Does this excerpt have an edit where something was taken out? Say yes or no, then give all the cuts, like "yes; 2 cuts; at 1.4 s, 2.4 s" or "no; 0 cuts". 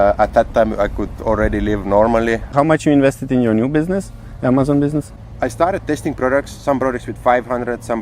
yes; 2 cuts; at 2.5 s, 5.2 s